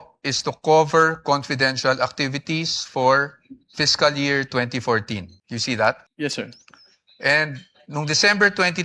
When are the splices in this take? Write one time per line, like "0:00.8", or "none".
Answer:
0:05.4
0:06.1

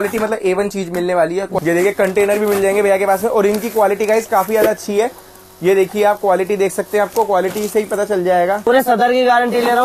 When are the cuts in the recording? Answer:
0:01.5
0:08.6

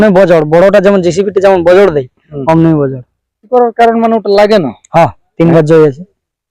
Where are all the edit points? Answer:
0:03.4

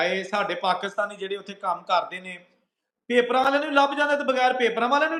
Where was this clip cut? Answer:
none

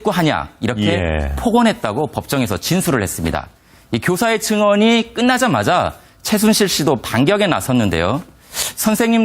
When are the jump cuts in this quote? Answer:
0:05.1

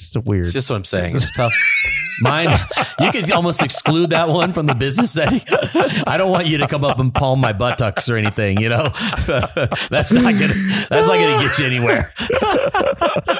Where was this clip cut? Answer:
none

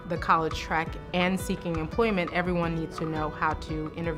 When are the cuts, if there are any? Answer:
none

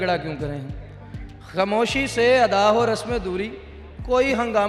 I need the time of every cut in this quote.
none

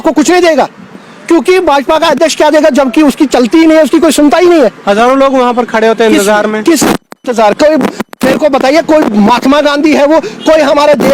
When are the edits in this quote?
none

